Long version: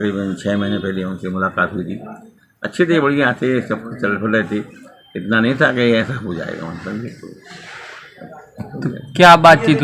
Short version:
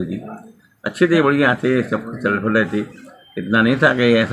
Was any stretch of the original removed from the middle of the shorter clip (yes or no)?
no